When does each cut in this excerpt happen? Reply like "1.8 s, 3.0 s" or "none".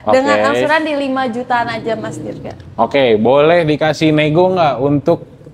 none